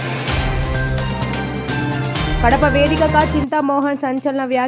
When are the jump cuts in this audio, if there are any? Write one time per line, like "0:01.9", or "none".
none